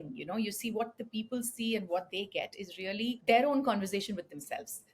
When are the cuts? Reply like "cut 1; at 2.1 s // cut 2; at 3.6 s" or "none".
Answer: cut 1; at 3.2 s

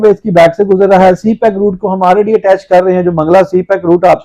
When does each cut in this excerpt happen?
none

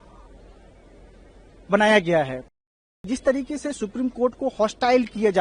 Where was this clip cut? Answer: cut 1; at 2.5 s

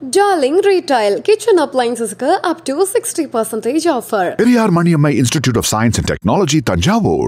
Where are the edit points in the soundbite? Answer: none

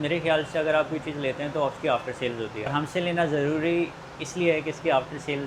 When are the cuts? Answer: none

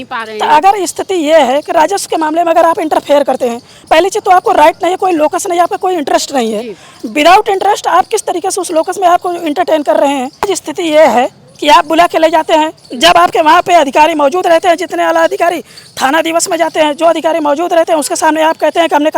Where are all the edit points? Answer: cut 1; at 10.5 s

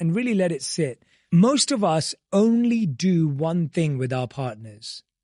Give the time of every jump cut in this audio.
cut 1; at 1.1 s

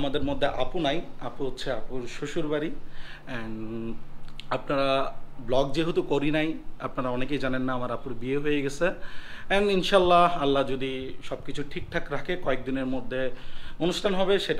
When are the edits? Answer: none

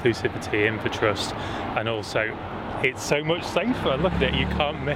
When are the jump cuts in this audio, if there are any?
none

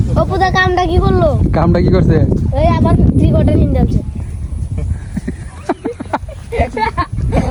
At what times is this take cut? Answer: none

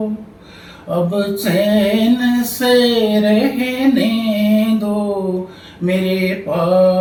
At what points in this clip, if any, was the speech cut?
none

